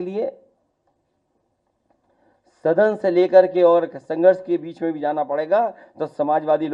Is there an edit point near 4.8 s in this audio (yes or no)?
no